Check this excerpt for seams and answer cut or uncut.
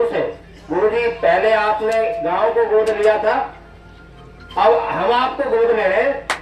uncut